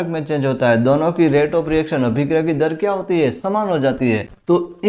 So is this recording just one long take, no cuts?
yes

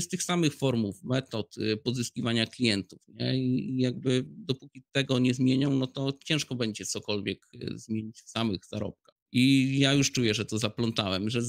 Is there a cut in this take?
no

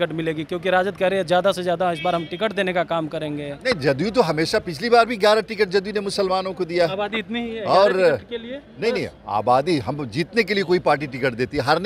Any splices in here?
no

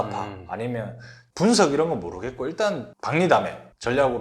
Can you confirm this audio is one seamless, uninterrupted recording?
no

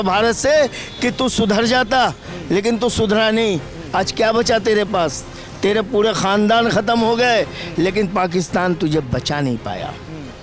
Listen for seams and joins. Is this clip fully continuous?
yes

